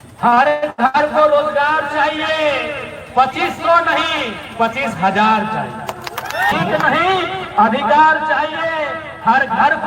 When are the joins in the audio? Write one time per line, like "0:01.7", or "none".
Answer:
0:06.5